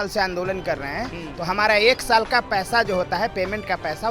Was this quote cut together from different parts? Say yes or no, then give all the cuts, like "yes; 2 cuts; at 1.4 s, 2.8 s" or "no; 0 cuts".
no; 0 cuts